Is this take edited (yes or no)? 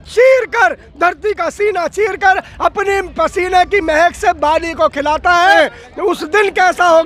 yes